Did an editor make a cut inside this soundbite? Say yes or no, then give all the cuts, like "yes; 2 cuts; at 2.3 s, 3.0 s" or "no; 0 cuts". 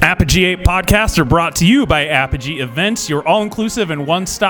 no; 0 cuts